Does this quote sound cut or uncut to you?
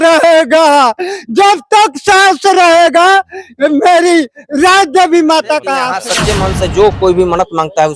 cut